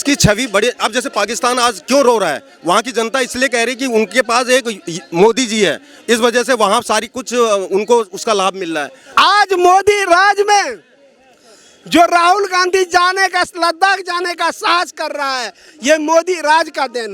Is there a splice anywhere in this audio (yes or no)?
yes